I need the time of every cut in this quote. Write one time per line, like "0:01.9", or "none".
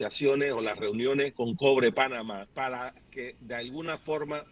0:01.3
0:02.7